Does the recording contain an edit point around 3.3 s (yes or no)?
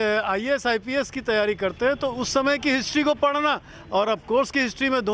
no